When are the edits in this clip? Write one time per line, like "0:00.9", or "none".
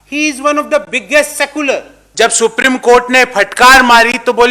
0:02.0

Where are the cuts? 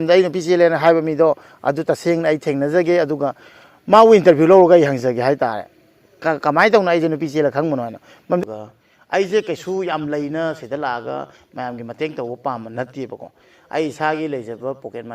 0:08.4

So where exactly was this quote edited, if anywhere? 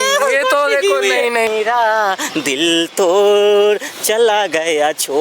0:01.5

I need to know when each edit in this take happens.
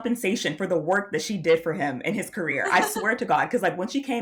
none

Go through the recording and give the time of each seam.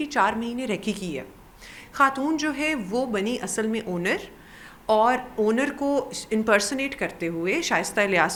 none

